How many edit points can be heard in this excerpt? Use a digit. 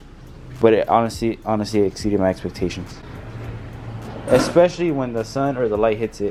0